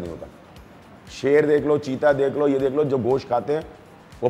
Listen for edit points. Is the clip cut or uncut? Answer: uncut